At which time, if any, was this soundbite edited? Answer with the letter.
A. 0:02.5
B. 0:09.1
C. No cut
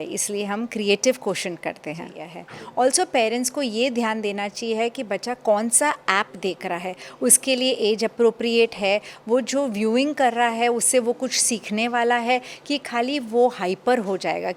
A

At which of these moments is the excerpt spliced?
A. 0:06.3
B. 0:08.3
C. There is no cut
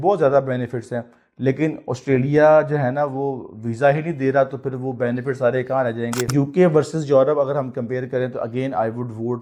A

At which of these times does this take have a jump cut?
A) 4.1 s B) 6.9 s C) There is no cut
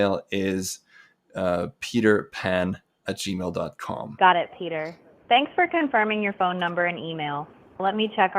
A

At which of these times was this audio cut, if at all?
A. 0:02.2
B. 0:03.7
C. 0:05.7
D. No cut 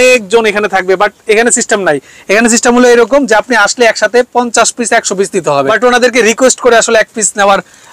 C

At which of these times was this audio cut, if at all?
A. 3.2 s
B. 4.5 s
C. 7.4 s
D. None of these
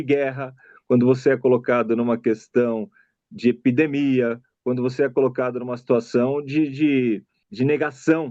C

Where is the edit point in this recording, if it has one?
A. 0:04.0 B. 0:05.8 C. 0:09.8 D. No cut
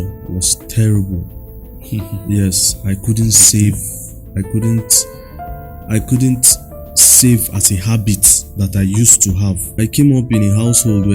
C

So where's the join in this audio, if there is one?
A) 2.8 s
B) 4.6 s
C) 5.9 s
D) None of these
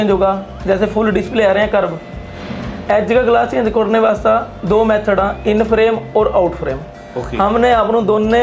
D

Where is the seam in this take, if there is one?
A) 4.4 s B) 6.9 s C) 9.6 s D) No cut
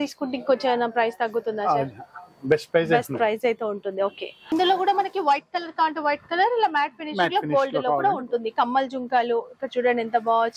A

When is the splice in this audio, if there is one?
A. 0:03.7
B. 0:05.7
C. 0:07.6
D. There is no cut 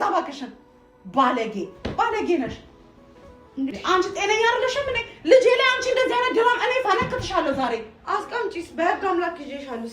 A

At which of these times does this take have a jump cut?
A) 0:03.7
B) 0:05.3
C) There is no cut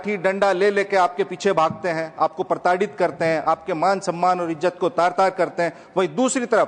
C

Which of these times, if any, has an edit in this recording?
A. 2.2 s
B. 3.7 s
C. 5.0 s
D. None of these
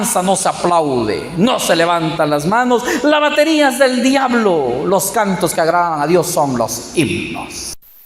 D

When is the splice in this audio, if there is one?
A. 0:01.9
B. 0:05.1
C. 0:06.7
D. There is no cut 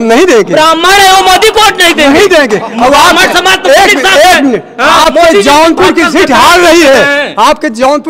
D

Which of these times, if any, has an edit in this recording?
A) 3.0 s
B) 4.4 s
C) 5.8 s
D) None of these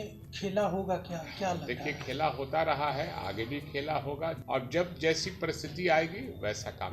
B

